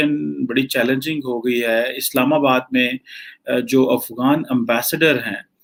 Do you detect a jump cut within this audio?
no; 0 cuts

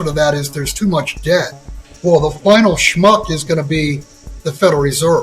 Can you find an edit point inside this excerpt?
yes; 1 cut; at 1.9 s

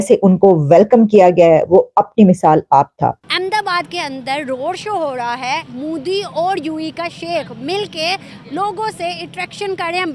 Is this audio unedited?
no; 1 cut; at 3.3 s

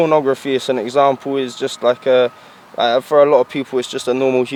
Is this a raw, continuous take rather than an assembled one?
yes; 0 cuts

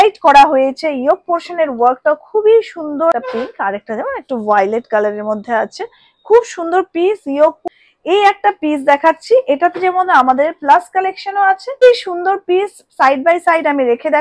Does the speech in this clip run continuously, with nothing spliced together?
no; 3 cuts; at 3.1 s, 7.6 s, 11.8 s

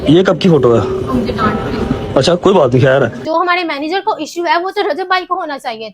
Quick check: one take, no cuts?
no; 1 cut; at 3.2 s

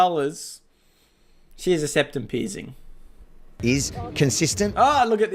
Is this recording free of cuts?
no; 1 cut; at 3.5 s

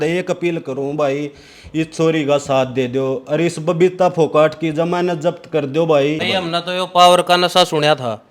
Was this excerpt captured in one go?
no; 1 cut; at 6.2 s

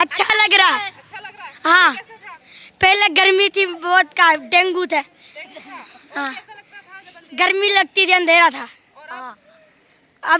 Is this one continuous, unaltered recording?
yes; 0 cuts

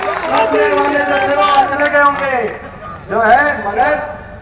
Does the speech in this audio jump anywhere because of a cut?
no; 0 cuts

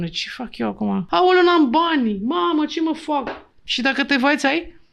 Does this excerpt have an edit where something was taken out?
yes; 1 cut; at 1.1 s

